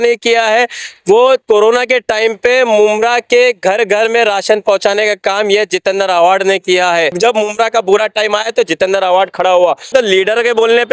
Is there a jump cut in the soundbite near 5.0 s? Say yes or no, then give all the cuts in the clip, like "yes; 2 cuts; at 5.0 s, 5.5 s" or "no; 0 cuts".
no; 2 cuts; at 7.1 s, 9.9 s